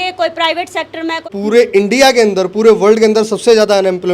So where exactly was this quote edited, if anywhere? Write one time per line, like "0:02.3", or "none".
0:01.3